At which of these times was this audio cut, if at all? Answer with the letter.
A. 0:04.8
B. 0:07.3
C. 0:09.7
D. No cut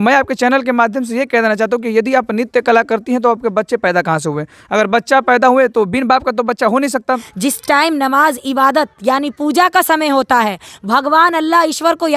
B